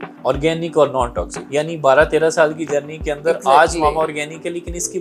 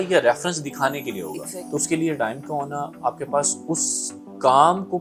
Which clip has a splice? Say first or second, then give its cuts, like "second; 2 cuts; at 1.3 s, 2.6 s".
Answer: second; 1 cut; at 1.5 s